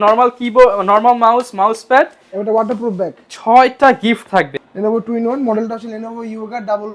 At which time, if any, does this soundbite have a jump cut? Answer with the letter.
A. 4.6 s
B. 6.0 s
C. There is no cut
A